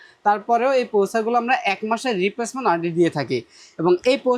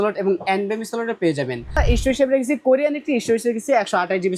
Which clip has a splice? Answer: second; 1 cut; at 1.8 s

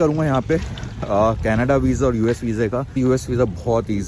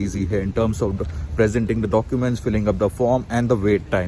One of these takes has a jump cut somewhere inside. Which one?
first; 1 cut; at 3.0 s

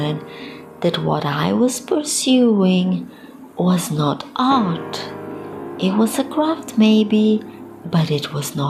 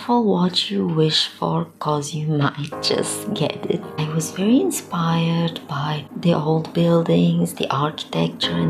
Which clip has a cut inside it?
second; 2 cuts; at 4.0 s, 6.1 s

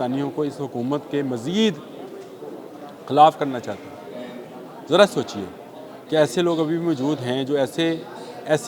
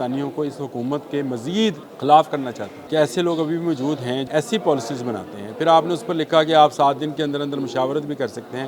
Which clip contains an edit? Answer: second; 3 cuts; at 1.9 s, 2.7 s, 4.2 s

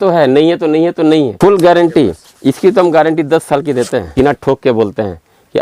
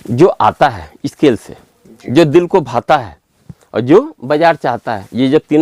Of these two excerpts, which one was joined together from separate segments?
first; 2 cuts; at 1.4 s, 4.1 s

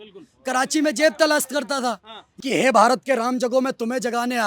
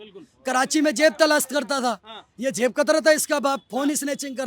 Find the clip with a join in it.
first; 1 cut; at 2.3 s

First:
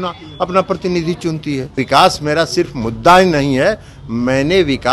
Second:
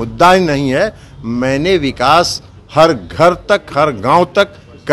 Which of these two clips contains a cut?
first; 1 cut; at 1.7 s

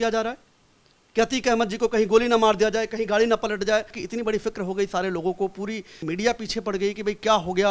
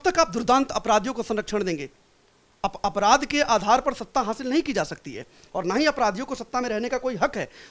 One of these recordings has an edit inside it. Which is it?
first; 2 cuts; at 4.0 s, 6.0 s

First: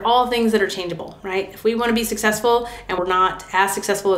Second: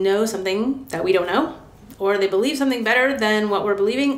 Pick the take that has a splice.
first; 1 cut; at 3.0 s

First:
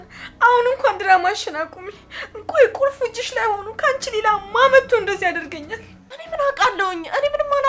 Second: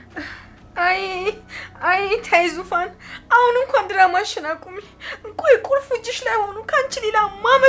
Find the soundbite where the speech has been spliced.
first; 1 cut; at 6.2 s

